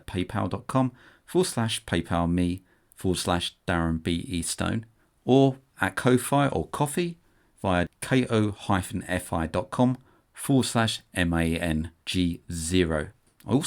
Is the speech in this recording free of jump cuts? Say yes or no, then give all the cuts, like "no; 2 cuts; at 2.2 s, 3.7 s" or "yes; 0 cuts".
yes; 0 cuts